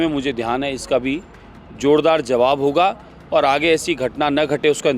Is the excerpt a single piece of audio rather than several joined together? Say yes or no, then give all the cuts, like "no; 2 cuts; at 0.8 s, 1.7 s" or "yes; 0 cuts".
yes; 0 cuts